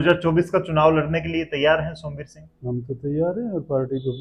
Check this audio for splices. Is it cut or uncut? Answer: uncut